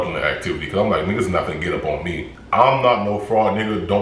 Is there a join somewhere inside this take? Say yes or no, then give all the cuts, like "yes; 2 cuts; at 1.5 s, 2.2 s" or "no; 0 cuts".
yes; 1 cut; at 2.3 s